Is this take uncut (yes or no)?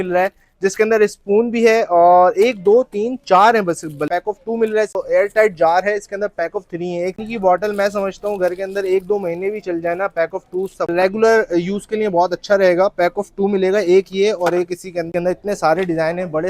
no